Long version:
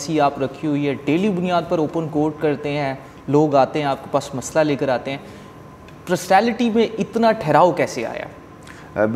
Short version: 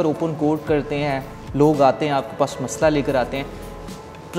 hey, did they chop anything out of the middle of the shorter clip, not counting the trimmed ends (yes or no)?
no